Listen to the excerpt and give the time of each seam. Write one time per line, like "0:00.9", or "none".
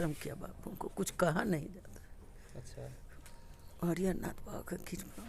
none